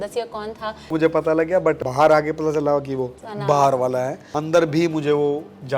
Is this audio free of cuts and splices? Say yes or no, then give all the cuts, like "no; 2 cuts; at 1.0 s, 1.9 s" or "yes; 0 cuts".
no; 4 cuts; at 0.9 s, 1.8 s, 3.2 s, 4.2 s